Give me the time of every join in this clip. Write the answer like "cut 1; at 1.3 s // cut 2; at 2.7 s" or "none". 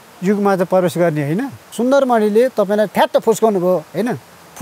cut 1; at 1.6 s